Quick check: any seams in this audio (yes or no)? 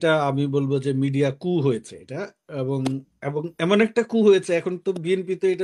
no